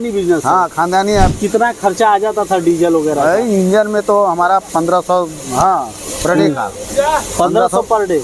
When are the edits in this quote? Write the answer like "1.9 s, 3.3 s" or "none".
1.3 s, 4.7 s